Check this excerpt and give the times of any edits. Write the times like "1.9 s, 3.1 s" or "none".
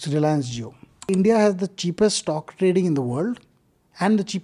1.1 s